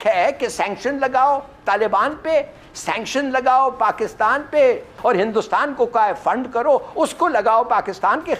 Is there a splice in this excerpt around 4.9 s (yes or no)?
yes